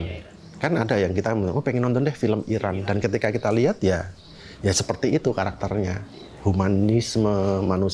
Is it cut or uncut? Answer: uncut